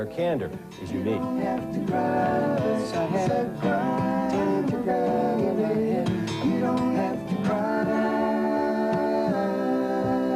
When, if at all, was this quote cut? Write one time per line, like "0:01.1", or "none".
0:01.3